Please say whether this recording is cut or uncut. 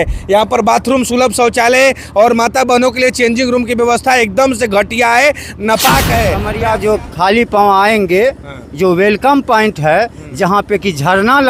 cut